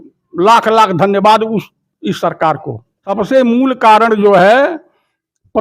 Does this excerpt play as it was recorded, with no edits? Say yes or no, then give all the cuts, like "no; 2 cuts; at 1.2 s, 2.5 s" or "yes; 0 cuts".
no; 1 cut; at 3.1 s